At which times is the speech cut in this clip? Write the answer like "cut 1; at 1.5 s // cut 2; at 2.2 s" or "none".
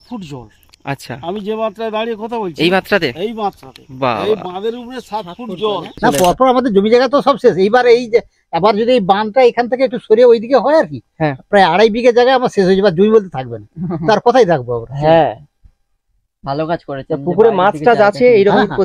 cut 1; at 6.0 s